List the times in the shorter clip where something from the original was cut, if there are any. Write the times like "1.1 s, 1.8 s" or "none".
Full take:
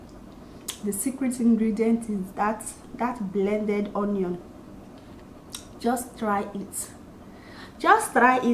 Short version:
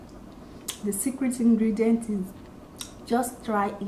2.3 s

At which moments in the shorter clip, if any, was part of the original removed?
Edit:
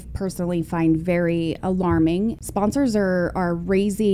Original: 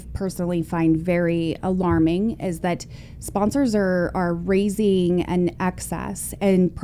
2.4 s

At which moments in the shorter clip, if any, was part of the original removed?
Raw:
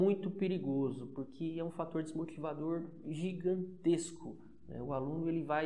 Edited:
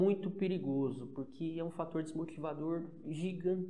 none

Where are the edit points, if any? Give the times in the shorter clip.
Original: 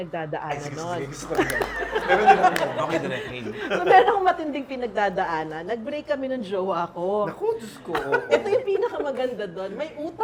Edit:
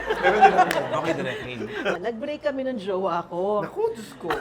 2.0 s

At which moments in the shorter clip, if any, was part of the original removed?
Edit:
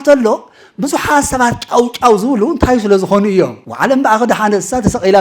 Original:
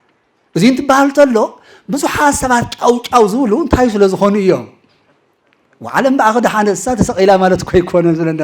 3.6 s

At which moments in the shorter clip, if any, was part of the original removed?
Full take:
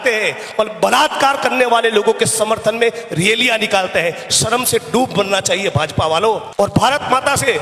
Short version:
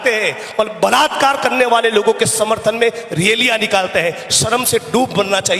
none

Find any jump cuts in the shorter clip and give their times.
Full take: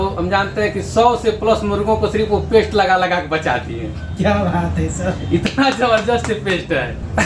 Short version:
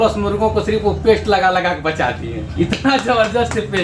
2.5 s

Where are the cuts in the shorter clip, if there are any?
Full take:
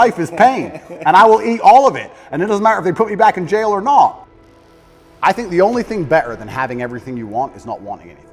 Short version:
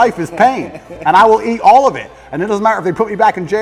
none

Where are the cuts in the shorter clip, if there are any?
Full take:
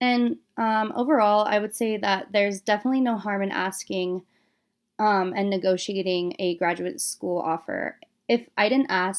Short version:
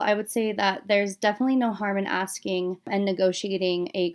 2.9 s

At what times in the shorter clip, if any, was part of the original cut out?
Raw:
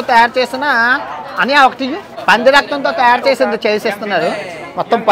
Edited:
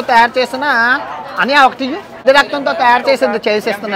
2.2 s

